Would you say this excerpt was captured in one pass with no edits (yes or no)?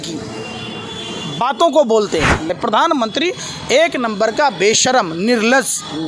no